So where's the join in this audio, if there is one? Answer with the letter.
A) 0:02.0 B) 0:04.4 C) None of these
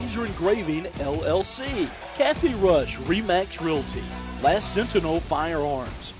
A